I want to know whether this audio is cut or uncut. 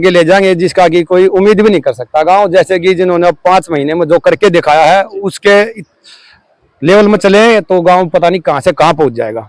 uncut